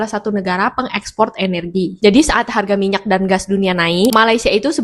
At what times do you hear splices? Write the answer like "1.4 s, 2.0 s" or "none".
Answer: none